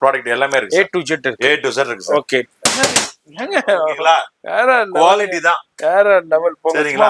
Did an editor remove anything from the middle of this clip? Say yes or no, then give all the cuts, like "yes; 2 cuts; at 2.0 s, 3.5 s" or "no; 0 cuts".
yes; 1 cut; at 2.5 s